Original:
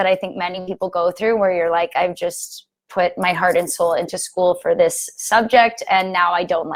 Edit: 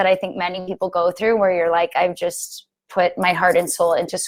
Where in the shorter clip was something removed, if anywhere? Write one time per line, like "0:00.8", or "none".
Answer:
none

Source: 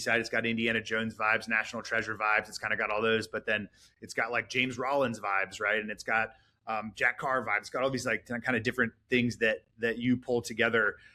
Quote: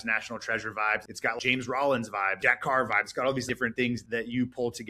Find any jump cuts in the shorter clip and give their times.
0:01.3
0:02.4
0:03.9

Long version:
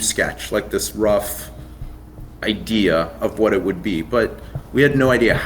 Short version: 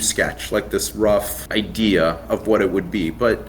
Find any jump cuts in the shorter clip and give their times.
0:01.4

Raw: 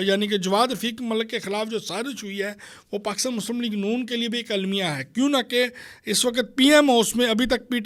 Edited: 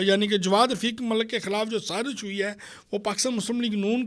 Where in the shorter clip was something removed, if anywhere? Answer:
none

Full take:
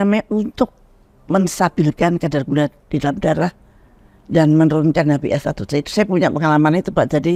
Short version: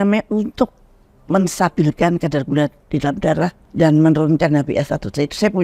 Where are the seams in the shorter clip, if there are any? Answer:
0:03.6

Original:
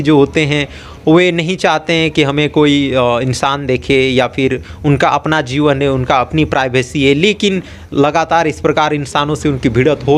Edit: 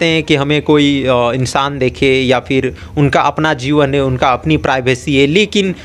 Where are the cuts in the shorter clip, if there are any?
none

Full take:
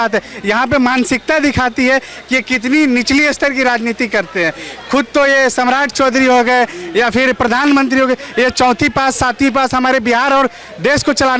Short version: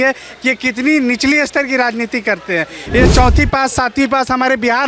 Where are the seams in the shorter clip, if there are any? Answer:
0:02.8

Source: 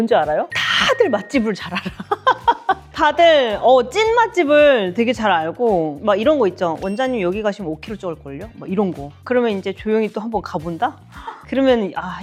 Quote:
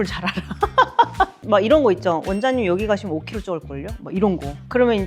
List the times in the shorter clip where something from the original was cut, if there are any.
0:01.4

